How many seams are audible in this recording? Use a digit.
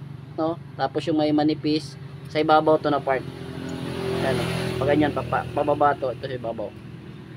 0